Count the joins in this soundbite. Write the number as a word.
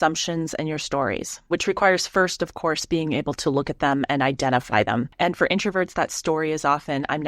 two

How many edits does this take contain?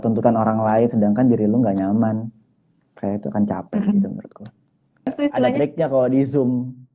one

